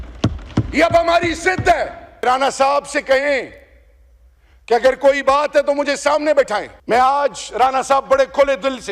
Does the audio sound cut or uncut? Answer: cut